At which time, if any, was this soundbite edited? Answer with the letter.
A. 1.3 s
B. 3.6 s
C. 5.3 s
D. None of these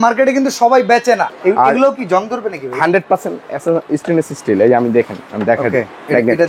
A